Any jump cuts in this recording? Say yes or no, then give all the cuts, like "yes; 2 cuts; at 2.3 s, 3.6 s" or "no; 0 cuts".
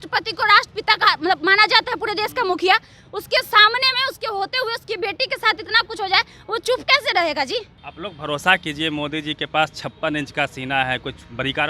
yes; 1 cut; at 7.8 s